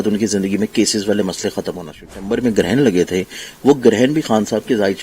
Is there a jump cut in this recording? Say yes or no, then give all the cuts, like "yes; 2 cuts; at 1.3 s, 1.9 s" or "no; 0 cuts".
yes; 1 cut; at 2.1 s